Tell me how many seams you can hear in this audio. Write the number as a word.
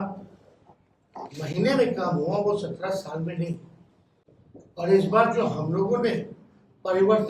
zero